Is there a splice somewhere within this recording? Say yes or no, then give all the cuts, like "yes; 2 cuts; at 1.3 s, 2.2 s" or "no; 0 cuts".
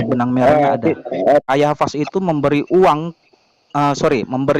yes; 1 cut; at 1.4 s